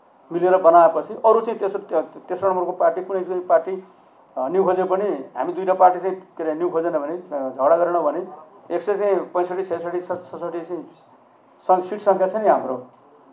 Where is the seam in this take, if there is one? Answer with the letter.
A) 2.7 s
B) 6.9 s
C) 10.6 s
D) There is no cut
D